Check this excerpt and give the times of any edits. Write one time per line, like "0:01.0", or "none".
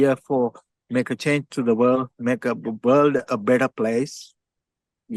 none